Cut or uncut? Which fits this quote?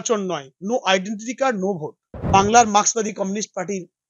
cut